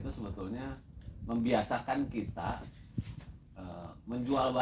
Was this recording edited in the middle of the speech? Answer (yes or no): no